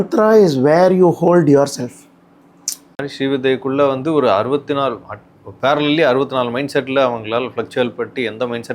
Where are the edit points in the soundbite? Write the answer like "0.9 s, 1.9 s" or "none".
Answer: 3.1 s